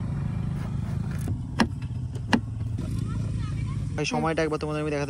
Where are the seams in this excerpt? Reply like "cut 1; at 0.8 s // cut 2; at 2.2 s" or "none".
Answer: cut 1; at 1.3 s // cut 2; at 3.9 s